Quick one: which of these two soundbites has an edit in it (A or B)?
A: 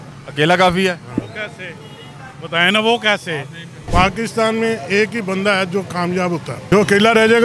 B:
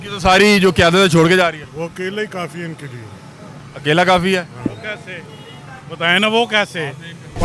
A